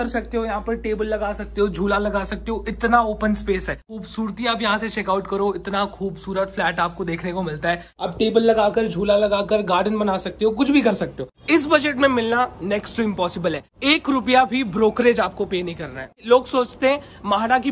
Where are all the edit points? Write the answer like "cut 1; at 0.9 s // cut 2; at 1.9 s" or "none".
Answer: cut 1; at 3.9 s // cut 2; at 7.9 s // cut 3; at 11.3 s // cut 4; at 13.7 s // cut 5; at 16.2 s